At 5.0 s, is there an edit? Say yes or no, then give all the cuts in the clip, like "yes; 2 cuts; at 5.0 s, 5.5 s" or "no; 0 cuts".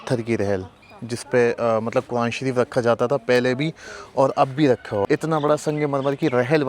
yes; 1 cut; at 5.0 s